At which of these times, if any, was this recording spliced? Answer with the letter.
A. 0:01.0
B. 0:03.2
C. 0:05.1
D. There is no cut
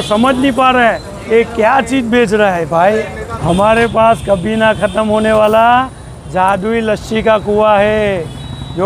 B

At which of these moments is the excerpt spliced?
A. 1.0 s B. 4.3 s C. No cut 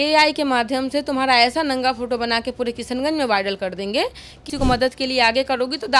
B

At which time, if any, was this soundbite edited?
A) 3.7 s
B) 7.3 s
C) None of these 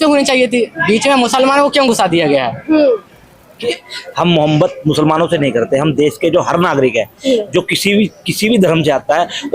A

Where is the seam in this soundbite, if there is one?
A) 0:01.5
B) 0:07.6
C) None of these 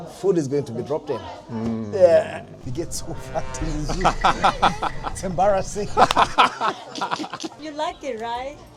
B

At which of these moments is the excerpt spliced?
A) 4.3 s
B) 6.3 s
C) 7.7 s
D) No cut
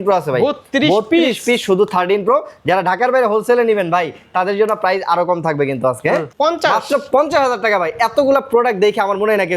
B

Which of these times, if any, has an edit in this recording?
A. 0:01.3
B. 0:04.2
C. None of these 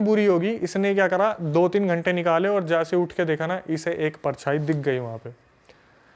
C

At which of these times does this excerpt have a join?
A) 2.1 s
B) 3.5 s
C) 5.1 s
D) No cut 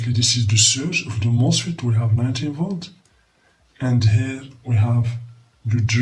D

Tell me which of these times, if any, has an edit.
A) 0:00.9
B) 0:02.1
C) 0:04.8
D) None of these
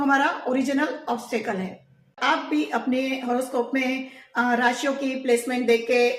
B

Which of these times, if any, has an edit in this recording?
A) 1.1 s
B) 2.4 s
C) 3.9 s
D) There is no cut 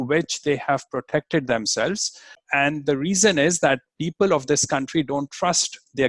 B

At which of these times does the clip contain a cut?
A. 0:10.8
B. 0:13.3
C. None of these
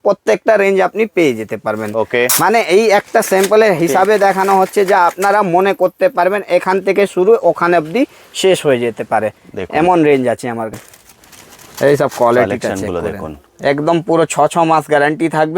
A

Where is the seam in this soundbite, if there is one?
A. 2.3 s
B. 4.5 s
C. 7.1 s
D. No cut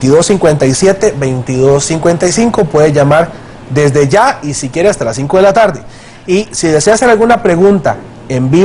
D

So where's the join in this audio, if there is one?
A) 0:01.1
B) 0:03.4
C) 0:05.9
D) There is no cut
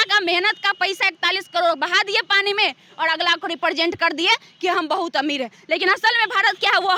D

